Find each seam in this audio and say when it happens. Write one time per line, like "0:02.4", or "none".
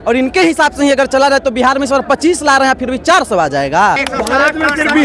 0:04.1